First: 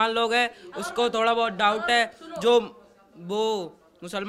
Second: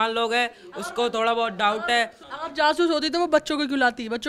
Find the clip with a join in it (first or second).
second